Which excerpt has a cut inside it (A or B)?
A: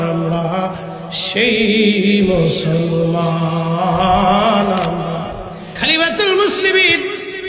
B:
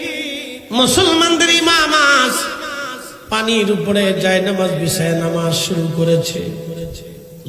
A